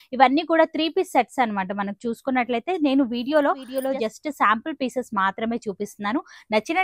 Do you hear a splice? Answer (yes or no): yes